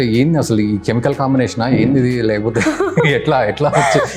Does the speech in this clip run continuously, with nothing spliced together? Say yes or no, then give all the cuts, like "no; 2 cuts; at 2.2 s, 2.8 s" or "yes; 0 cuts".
yes; 0 cuts